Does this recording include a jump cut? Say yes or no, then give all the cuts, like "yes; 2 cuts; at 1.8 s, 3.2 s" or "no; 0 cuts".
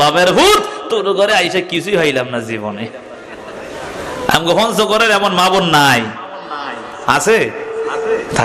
no; 0 cuts